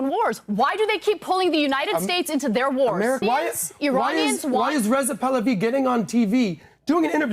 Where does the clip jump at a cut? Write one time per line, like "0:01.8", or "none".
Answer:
0:03.2